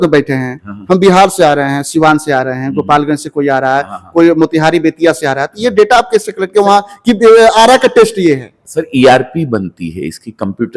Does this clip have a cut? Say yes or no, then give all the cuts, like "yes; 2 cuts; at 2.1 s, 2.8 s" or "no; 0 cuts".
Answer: no; 0 cuts